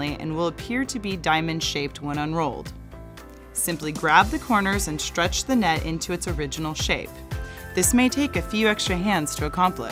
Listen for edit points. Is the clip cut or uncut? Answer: uncut